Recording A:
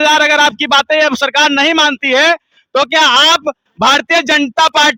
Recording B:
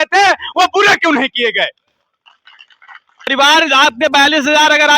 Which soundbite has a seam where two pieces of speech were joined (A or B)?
B